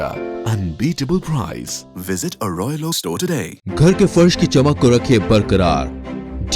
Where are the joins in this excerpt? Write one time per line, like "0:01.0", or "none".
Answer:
0:03.6